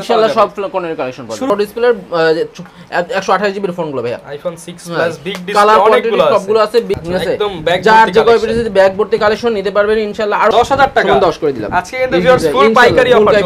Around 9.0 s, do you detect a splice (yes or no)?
no